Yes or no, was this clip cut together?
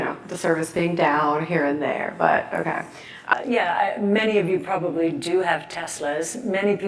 yes